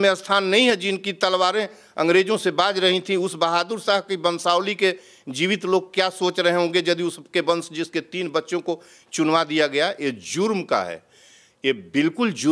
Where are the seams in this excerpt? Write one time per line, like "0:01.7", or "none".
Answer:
none